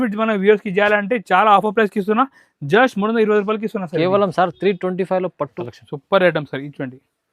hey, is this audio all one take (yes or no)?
no